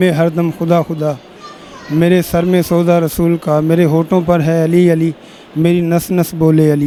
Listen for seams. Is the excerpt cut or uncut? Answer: uncut